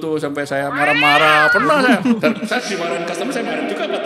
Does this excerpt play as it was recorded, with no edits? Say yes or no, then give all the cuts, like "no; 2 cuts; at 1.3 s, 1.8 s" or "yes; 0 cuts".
yes; 0 cuts